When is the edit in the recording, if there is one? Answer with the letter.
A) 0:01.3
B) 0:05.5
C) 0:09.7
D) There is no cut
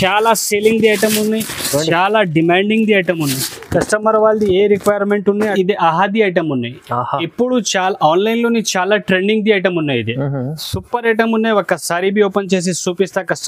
B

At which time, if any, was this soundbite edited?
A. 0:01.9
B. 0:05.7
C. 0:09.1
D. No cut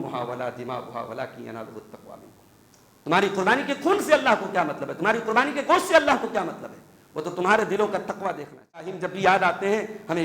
C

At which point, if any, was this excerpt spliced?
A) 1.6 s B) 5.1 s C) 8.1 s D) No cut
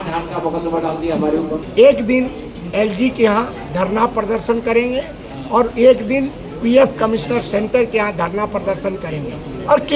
A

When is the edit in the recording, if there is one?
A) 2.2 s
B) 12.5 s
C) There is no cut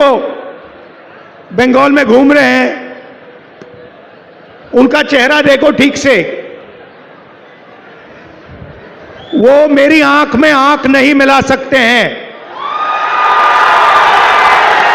C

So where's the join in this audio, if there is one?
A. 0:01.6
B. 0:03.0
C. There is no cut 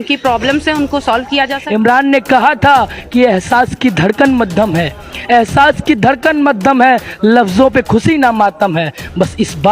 A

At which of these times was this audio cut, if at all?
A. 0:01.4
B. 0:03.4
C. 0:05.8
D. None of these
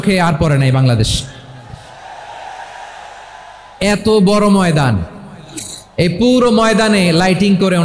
D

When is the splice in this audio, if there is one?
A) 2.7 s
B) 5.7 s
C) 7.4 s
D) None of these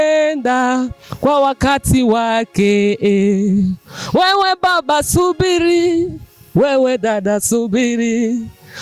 D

